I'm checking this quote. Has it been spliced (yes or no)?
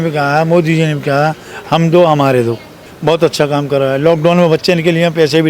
yes